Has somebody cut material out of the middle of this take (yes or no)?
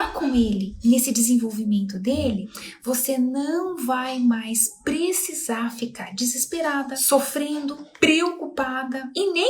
yes